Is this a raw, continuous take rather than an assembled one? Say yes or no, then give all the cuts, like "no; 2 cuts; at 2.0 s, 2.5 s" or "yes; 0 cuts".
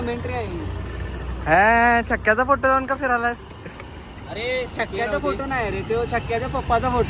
yes; 0 cuts